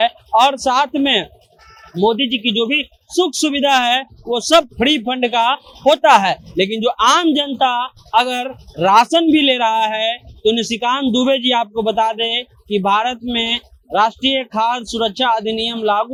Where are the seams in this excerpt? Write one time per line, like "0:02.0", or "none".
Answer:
none